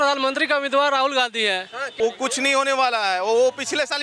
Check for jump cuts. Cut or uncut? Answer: cut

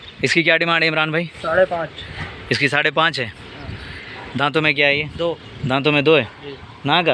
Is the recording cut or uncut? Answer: uncut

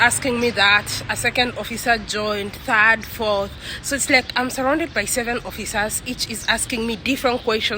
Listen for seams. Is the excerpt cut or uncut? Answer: uncut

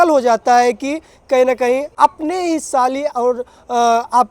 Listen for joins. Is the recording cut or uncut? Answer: cut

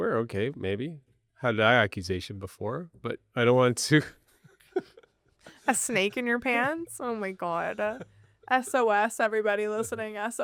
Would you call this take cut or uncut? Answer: uncut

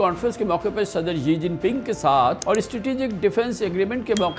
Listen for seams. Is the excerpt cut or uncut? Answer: cut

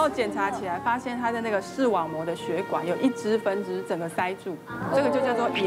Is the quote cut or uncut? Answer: uncut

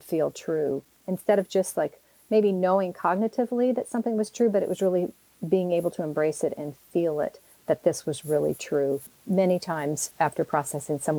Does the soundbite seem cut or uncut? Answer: uncut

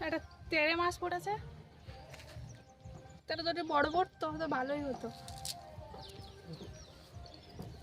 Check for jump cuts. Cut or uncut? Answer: cut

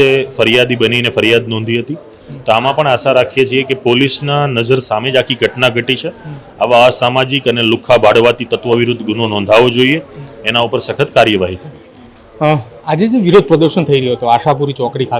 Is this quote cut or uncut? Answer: uncut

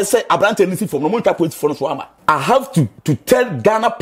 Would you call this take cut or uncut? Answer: cut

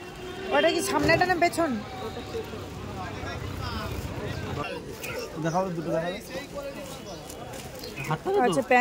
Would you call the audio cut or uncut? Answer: cut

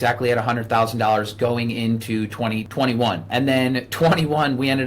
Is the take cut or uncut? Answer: cut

